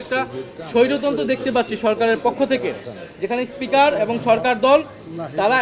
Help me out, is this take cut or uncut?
uncut